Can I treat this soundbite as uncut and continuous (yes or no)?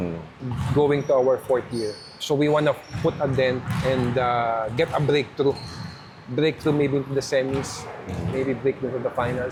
yes